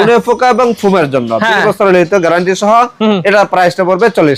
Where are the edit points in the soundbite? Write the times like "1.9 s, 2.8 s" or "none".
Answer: none